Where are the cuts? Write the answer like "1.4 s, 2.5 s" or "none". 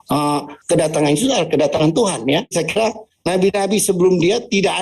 2.5 s